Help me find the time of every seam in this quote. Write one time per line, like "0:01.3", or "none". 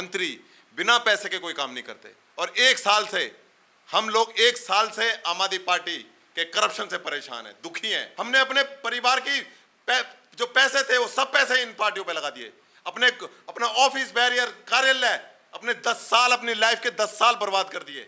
0:08.0